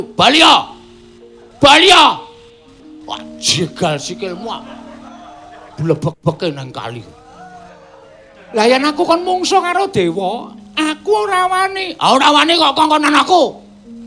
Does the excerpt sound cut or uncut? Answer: uncut